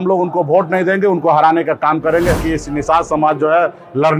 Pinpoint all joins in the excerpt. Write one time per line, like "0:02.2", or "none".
0:02.4

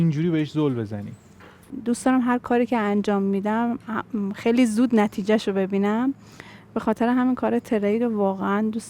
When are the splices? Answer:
0:01.7

